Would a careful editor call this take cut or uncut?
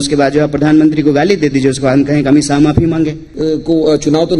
cut